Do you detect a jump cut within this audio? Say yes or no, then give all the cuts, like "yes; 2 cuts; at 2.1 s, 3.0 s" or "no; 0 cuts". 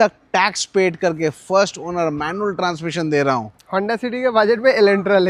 no; 0 cuts